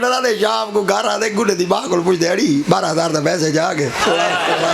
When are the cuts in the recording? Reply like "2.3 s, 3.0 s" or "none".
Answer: none

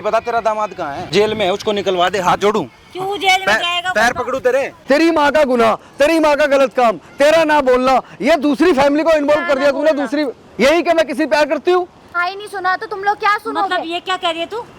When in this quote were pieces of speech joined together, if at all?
1.0 s, 4.8 s, 12.1 s

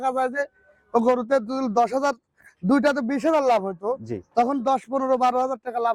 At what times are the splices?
none

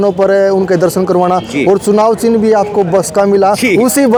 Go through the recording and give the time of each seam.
none

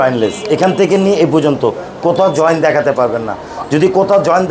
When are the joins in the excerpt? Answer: none

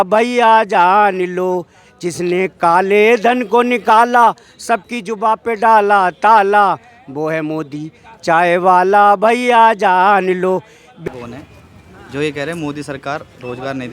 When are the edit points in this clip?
11.0 s

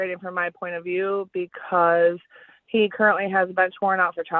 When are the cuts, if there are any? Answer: none

